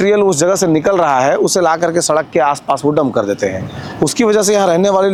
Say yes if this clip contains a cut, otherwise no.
no